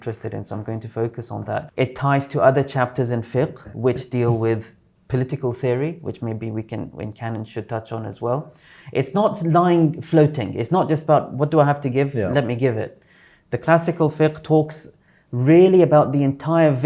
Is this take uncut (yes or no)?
no